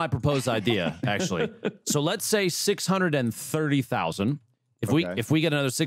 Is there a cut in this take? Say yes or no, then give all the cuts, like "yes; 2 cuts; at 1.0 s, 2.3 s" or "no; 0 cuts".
no; 0 cuts